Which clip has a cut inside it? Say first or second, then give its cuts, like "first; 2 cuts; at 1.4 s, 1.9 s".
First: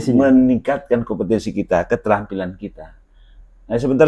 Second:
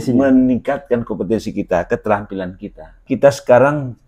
second; 1 cut; at 3.0 s